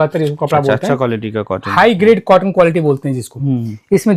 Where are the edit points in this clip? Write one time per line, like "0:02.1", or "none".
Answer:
none